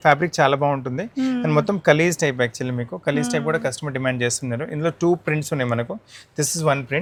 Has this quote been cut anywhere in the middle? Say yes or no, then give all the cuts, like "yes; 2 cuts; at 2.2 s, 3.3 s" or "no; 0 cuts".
no; 0 cuts